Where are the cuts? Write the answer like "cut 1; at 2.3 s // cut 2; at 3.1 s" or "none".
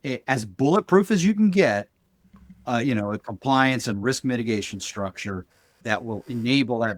cut 1; at 5.8 s

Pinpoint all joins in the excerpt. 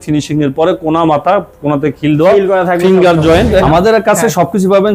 cut 1; at 3.6 s

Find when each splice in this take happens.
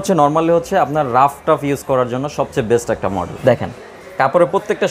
cut 1; at 3.3 s

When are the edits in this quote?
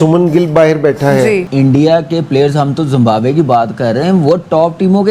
cut 1; at 1.5 s

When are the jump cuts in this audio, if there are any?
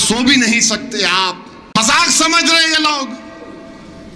cut 1; at 2.0 s

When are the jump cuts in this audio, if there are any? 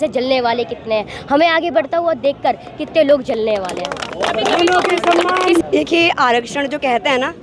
none

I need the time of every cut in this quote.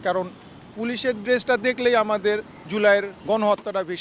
cut 1; at 2.6 s // cut 2; at 3.1 s

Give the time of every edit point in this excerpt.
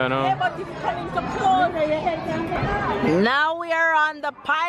cut 1; at 2.5 s

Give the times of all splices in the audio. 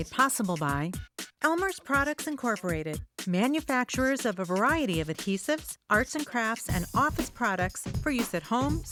none

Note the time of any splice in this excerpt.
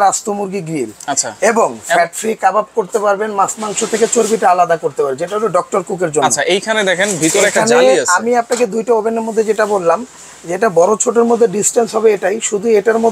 none

